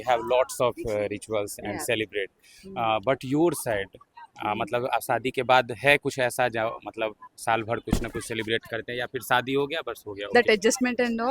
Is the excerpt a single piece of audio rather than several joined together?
no; 1 cut; at 10.3 s

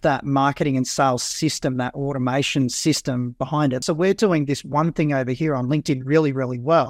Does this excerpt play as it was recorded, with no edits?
no; 1 cut; at 3.8 s

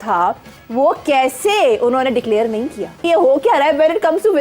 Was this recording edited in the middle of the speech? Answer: yes; 1 cut; at 3.0 s

